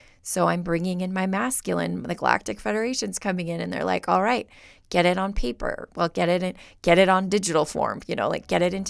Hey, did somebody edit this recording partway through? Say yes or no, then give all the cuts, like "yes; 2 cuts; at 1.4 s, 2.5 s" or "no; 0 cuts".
no; 0 cuts